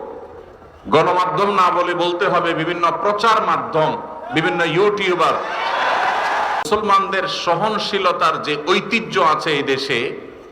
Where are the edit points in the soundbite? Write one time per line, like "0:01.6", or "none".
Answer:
0:06.7